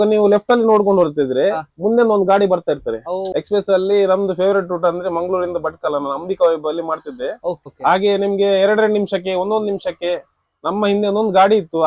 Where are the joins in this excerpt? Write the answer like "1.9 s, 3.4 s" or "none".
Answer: 3.3 s, 7.7 s